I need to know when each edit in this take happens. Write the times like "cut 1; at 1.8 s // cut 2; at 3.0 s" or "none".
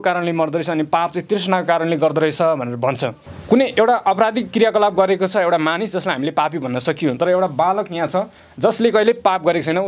cut 1; at 3.2 s